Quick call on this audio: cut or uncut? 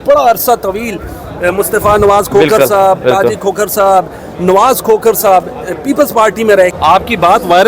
cut